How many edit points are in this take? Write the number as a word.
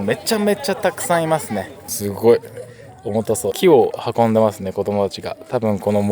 two